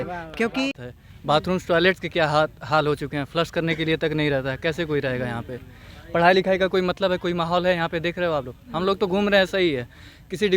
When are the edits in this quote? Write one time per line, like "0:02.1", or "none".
0:00.9